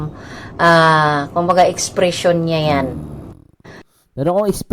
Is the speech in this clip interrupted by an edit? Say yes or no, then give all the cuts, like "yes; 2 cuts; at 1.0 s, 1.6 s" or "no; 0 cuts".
yes; 1 cut; at 3.0 s